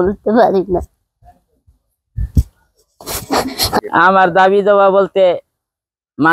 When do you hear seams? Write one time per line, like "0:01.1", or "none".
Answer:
0:03.8